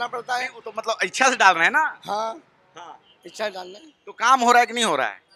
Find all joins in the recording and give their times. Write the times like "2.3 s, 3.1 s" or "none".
none